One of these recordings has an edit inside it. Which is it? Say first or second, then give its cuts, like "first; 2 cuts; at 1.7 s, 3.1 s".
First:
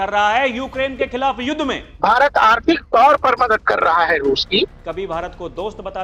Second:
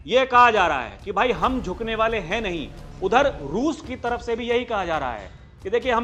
first; 2 cuts; at 1.8 s, 4.8 s